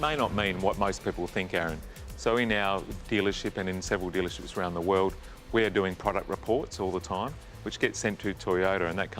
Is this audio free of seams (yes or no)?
yes